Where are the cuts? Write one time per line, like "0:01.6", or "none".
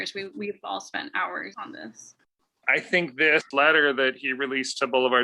0:01.5
0:02.6
0:03.5